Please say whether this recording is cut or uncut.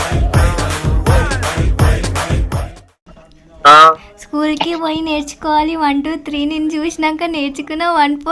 cut